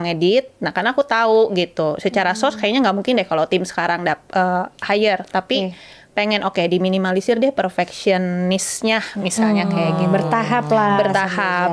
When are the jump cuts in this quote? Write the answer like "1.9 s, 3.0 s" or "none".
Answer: none